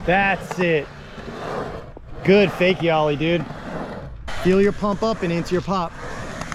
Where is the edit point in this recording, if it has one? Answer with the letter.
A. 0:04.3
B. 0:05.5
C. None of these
A